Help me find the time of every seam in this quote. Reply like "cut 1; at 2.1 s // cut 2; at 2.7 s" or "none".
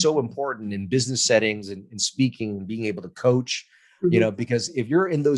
none